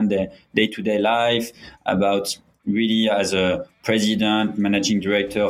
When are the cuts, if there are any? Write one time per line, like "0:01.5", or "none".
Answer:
none